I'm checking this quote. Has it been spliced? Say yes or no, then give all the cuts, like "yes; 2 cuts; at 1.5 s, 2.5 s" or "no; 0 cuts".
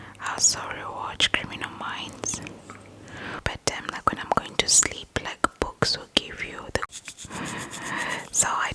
yes; 2 cuts; at 3.4 s, 6.9 s